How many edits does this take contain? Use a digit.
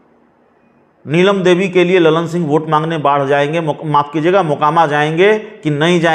0